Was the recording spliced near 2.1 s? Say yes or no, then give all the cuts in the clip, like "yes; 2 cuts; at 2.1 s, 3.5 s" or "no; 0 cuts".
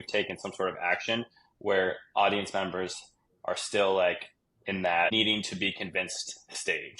no; 1 cut; at 5.1 s